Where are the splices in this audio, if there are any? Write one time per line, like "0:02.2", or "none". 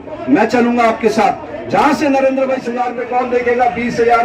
0:02.7